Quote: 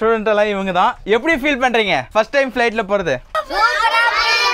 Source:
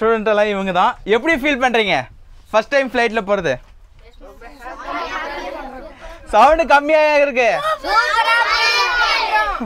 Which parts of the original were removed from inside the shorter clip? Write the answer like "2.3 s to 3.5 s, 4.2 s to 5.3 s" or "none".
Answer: 2.1 s to 2.4 s, 3.7 s to 7.7 s